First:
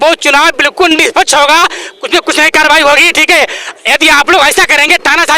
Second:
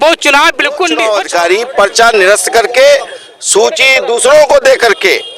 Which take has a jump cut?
second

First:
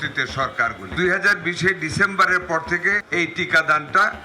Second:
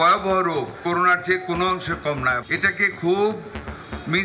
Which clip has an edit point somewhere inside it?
first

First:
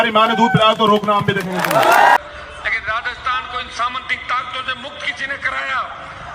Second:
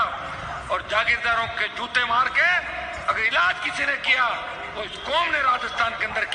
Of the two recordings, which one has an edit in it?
first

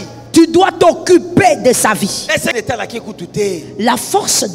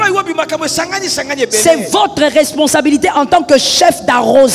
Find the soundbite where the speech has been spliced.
first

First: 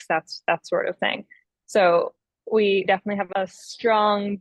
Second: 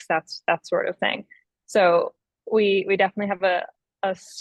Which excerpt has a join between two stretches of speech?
first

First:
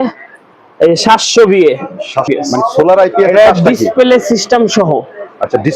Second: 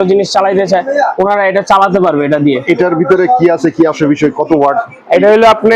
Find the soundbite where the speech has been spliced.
first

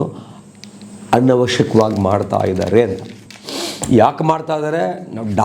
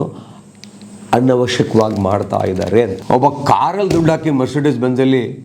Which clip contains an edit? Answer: second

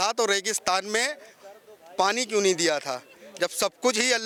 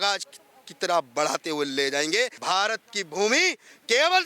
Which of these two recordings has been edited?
second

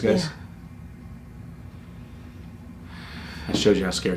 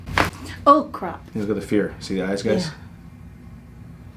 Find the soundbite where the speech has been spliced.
second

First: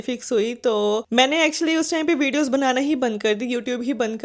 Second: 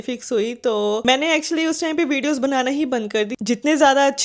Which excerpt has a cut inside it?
second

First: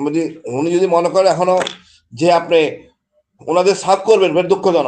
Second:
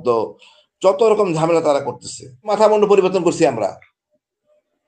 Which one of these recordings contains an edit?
second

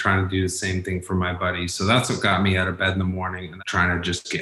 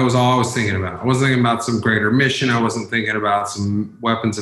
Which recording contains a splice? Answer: first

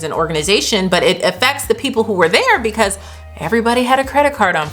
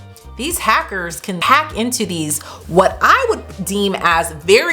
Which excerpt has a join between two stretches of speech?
second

